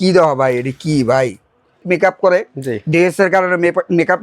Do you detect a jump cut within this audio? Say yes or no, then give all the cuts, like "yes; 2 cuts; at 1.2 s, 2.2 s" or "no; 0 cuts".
yes; 1 cut; at 1.8 s